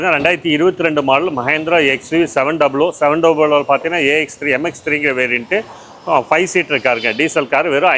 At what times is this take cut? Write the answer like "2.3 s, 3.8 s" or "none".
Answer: none